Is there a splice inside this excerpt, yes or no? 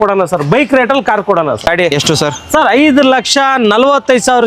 yes